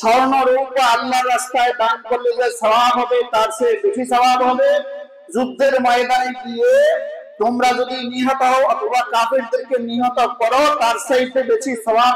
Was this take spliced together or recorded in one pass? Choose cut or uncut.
uncut